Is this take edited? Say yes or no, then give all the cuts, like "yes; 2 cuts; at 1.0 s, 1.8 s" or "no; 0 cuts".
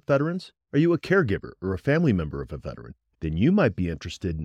no; 0 cuts